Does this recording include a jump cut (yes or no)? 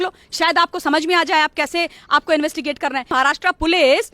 yes